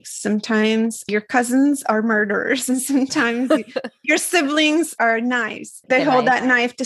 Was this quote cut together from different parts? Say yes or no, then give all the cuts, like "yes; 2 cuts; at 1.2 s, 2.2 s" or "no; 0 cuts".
yes; 1 cut; at 5.9 s